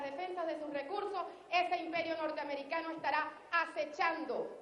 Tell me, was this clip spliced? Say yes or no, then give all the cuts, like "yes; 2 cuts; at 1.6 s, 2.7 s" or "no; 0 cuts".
yes; 1 cut; at 1.3 s